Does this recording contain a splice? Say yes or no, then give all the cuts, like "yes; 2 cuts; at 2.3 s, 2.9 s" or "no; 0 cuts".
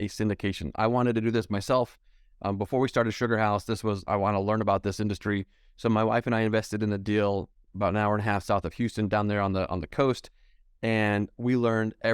yes; 1 cut; at 4.0 s